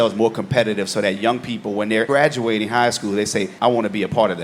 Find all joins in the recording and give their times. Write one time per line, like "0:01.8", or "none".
none